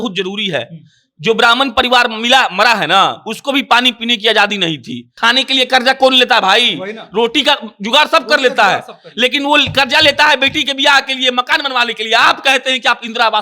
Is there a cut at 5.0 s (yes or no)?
yes